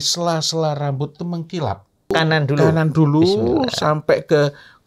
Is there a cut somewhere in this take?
yes; 1 cut; at 2.1 s

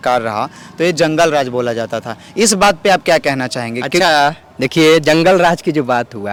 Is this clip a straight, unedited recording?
yes; 0 cuts

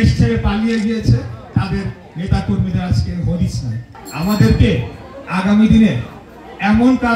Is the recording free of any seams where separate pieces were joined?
yes; 0 cuts

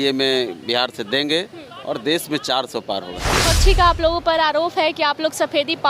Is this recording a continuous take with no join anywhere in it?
no; 1 cut; at 3.4 s

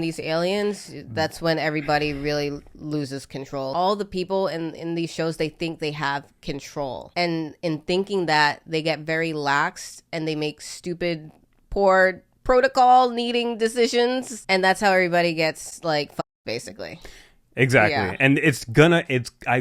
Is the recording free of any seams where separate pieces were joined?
no; 3 cuts; at 3.7 s, 7.1 s, 14.3 s

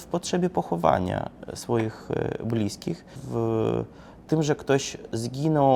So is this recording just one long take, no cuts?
no; 1 cut; at 3.2 s

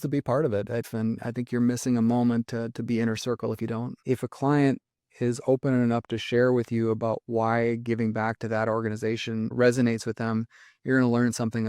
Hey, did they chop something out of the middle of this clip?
yes; 2 cuts; at 0.8 s, 4.0 s

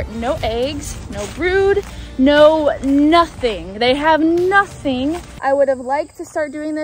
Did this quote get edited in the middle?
yes; 1 cut; at 5.3 s

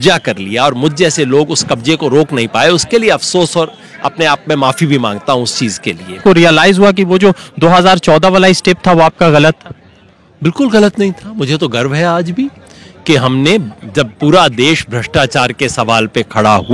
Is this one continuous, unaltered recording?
no; 1 cut; at 6.2 s

